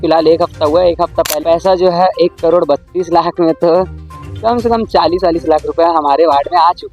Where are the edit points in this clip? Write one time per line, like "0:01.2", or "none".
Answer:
0:01.3